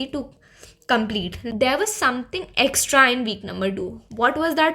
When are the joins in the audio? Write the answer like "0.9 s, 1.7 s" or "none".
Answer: 1.4 s